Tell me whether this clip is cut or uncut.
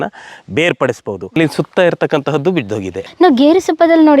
cut